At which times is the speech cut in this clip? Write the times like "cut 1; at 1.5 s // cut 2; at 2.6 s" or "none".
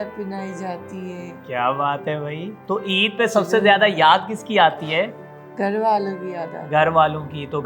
cut 1; at 2.5 s